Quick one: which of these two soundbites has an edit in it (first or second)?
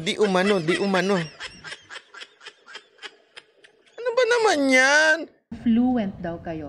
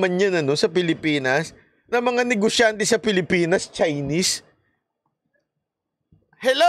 first